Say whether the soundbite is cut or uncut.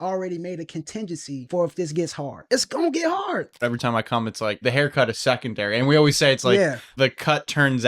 cut